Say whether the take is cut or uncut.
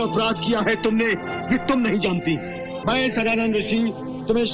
cut